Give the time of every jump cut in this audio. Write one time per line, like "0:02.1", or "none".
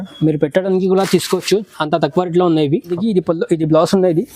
0:02.9